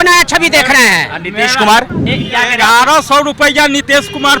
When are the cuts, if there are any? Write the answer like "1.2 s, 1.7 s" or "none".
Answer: 2.1 s